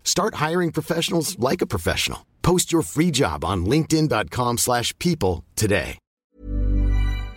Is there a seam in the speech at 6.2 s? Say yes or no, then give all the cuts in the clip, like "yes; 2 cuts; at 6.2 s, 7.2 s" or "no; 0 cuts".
yes; 1 cut; at 6.2 s